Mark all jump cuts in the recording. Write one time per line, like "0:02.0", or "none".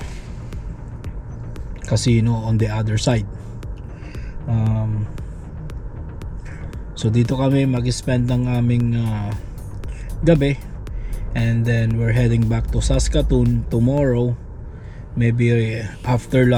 none

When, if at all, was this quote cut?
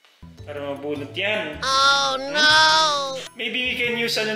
0:03.3

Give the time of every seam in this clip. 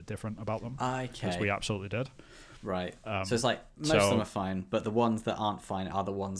none

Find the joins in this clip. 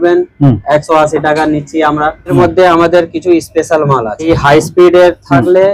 0:02.3
0:04.3

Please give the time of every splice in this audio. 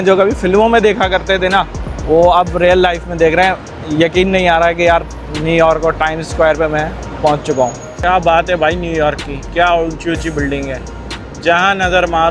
0:07.9

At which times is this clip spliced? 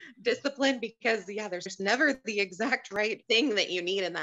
0:01.7
0:02.9

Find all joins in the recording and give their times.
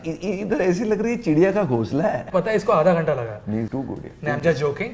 0:02.3

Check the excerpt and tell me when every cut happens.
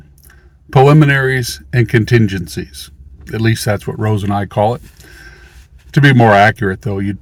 none

